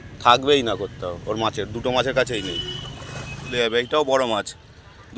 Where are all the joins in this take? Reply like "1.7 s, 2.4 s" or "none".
3.5 s